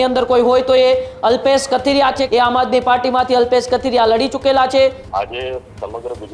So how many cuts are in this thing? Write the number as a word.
two